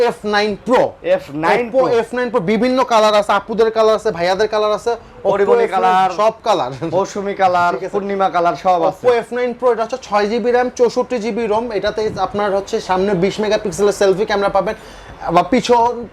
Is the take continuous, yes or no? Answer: yes